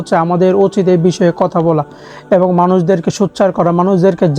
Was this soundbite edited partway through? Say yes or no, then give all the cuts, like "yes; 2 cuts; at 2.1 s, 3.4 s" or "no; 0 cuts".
no; 0 cuts